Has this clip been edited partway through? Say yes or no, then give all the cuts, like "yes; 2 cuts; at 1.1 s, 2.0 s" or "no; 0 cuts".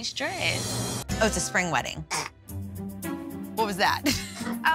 yes; 1 cut; at 1.0 s